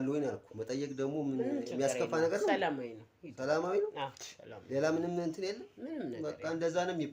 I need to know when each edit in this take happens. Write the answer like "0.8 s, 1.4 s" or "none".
none